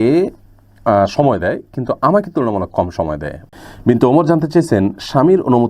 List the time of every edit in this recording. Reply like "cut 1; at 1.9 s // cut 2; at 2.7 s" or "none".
cut 1; at 3.4 s